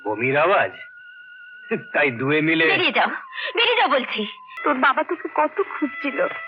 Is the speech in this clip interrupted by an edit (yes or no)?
yes